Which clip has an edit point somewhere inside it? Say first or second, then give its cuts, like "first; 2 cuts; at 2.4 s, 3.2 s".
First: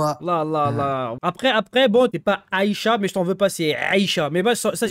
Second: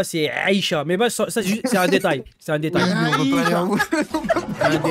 first; 2 cuts; at 1.1 s, 2.1 s